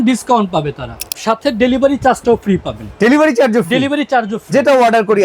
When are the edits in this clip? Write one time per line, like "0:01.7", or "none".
0:00.9